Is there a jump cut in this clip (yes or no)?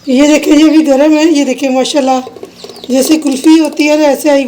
no